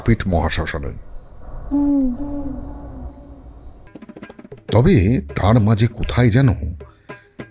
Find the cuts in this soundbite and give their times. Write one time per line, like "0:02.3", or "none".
0:03.9